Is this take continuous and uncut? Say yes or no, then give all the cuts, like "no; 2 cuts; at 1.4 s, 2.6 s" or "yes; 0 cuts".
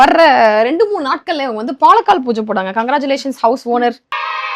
yes; 0 cuts